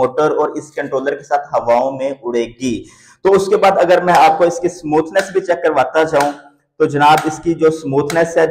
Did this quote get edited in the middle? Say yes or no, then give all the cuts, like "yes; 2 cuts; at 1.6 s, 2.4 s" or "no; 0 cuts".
no; 0 cuts